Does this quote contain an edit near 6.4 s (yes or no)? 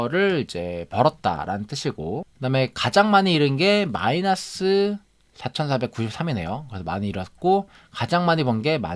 no